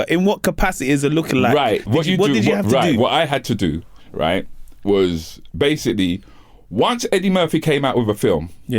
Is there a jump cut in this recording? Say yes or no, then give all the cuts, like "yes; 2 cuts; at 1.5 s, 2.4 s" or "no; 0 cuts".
no; 0 cuts